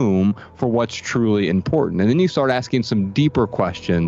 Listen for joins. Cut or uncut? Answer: uncut